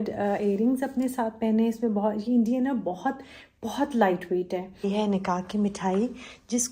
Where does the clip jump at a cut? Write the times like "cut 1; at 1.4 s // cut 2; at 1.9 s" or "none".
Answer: cut 1; at 4.9 s